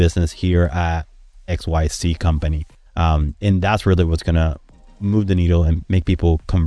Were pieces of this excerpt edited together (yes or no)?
no